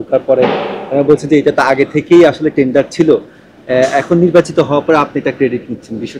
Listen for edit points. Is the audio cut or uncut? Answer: uncut